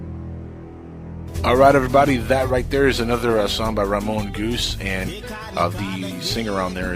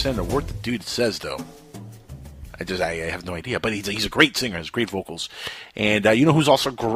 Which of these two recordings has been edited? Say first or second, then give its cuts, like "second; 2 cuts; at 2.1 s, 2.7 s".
first; 1 cut; at 1.2 s